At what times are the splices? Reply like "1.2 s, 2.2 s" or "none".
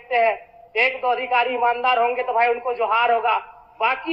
none